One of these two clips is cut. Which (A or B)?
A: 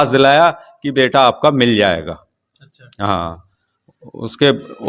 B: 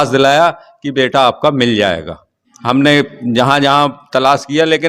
B